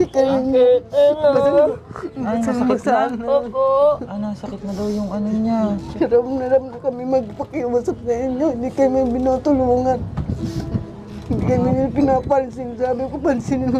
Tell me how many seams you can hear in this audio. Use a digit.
1